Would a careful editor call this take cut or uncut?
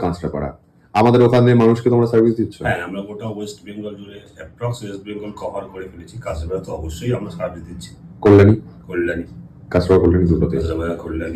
uncut